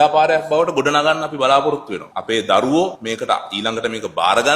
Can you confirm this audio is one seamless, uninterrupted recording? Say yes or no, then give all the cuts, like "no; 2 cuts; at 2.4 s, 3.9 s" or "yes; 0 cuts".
no; 1 cut; at 2.1 s